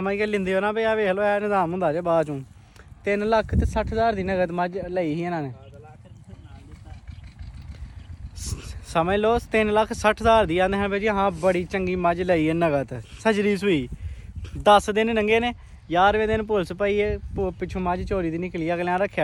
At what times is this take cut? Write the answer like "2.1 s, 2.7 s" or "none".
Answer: none